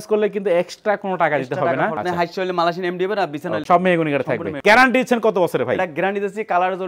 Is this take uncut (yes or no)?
no